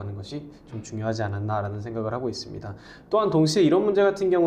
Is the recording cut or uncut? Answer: uncut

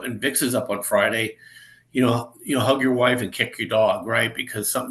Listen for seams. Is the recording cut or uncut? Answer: uncut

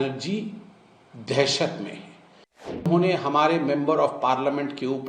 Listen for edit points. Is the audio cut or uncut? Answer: cut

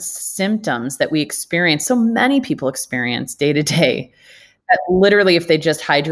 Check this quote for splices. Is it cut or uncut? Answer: uncut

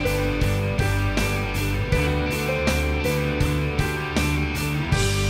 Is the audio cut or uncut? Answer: uncut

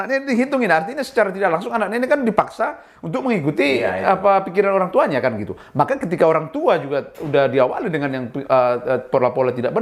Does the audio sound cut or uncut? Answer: uncut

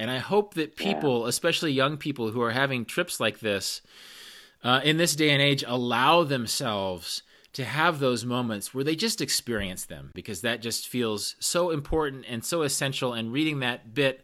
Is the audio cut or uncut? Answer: cut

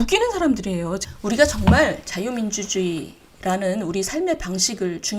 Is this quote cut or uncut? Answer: cut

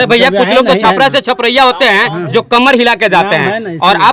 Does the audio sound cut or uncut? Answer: uncut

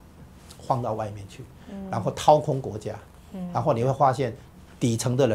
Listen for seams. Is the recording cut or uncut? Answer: uncut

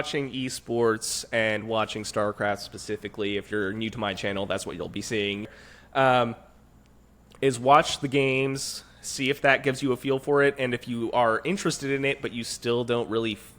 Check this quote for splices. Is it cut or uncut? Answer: cut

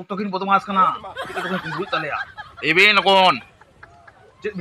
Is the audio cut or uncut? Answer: uncut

